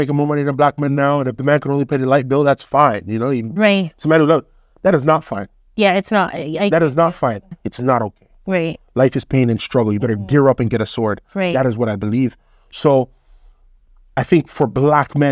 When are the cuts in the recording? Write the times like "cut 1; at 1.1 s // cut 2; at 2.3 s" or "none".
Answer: cut 1; at 7.6 s